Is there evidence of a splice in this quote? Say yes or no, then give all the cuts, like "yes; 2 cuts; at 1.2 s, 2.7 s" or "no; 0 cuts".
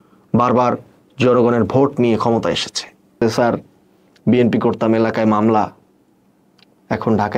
yes; 1 cut; at 3.2 s